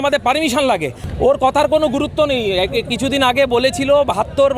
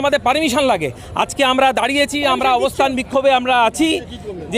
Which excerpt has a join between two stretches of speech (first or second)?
first